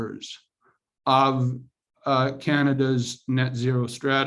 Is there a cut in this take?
no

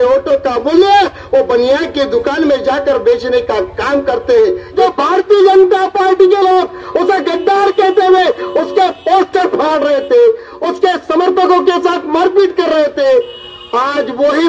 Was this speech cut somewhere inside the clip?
yes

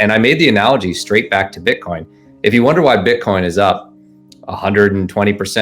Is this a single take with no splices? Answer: yes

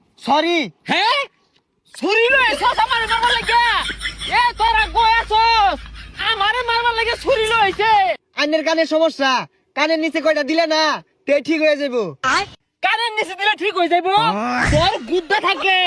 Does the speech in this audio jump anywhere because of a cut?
yes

